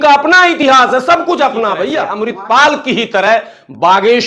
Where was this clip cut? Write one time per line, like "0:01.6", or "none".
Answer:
0:02.1

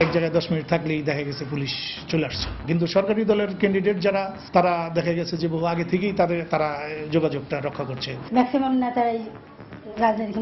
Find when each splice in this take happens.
none

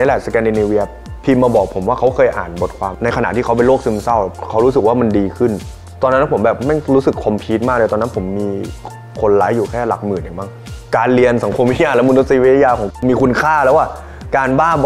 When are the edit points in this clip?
0:02.9
0:04.3
0:10.7

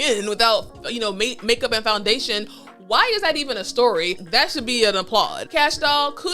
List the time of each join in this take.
0:04.2
0:05.4

